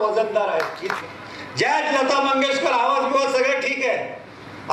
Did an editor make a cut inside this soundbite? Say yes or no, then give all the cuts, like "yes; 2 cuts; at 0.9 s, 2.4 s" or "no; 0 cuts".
yes; 1 cut; at 0.9 s